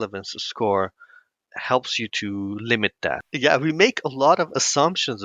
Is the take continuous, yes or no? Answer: no